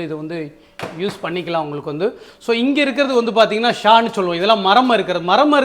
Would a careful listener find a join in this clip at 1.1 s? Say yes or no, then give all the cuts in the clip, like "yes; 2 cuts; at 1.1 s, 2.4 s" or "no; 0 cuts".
no; 0 cuts